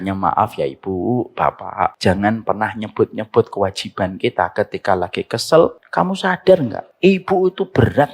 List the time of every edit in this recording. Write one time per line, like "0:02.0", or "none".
0:02.0
0:05.8
0:06.8